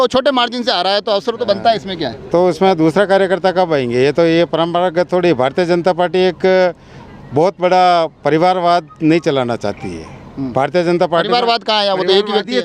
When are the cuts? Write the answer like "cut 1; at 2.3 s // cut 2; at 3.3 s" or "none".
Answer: none